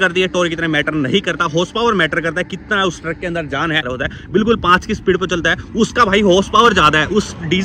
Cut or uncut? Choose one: cut